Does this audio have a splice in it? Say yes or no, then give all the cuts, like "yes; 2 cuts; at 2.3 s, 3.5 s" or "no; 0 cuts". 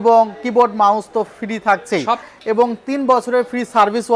yes; 1 cut; at 2.3 s